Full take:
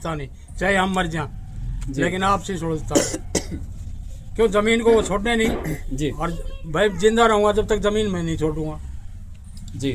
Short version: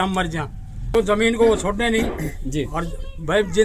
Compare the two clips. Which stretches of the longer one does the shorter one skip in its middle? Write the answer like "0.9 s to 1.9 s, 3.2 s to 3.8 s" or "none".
1.7 s to 4.4 s